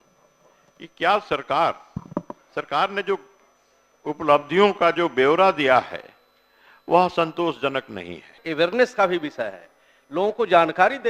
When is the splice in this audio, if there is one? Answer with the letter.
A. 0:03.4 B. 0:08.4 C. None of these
B